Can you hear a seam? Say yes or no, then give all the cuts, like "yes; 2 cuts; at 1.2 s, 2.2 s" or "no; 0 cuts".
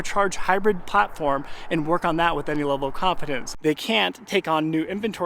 yes; 1 cut; at 3.4 s